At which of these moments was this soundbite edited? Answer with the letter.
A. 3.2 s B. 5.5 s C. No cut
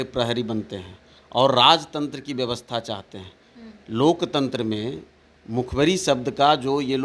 C